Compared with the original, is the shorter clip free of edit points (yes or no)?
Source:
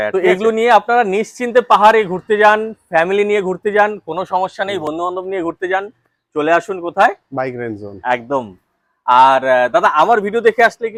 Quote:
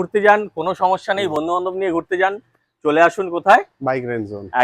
yes